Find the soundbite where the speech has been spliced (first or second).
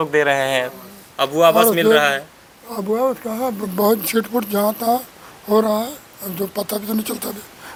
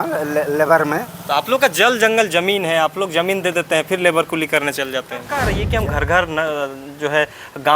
second